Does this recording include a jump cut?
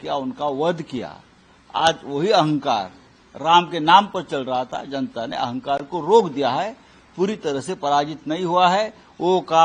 no; 0 cuts

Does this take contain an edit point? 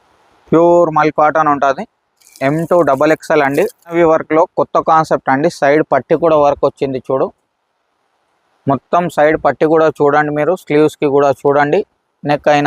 yes; 1 cut; at 3.9 s

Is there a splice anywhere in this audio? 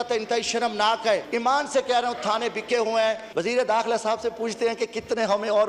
yes; 2 cuts; at 1.3 s, 3.3 s

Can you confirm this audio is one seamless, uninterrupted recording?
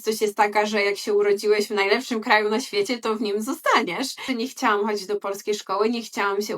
no; 1 cut; at 4.3 s

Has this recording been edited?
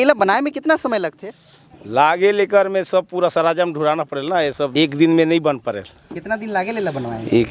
yes; 1 cut; at 4.7 s

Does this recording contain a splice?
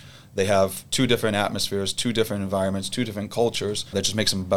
no; 0 cuts

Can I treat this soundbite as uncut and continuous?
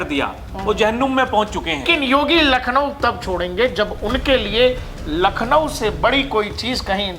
no; 1 cut; at 1.9 s

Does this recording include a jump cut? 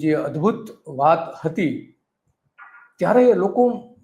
no; 0 cuts

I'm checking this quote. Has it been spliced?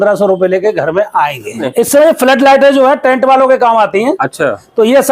yes; 1 cut; at 1.5 s

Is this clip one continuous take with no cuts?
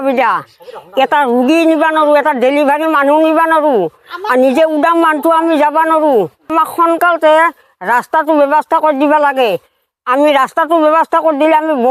no; 1 cut; at 6.5 s

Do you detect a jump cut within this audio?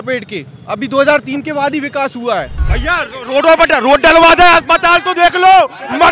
yes; 1 cut; at 2.6 s

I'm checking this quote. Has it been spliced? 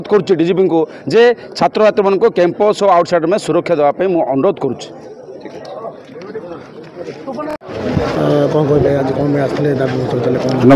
yes; 1 cut; at 7.6 s

